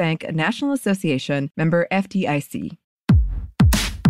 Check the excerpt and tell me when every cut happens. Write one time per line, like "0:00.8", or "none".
0:03.2

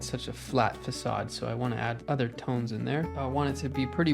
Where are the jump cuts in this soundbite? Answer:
0:02.0
0:03.1

